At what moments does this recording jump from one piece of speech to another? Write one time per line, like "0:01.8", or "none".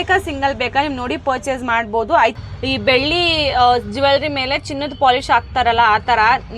0:02.4